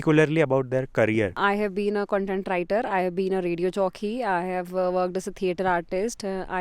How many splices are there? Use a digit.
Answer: 1